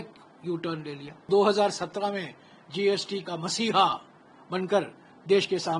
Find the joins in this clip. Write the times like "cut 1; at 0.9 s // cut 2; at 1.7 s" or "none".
cut 1; at 1.2 s